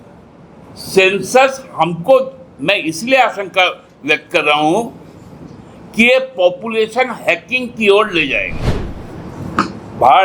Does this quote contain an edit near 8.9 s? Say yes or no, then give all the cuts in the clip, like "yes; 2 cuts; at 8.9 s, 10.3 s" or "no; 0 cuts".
yes; 1 cut; at 8.9 s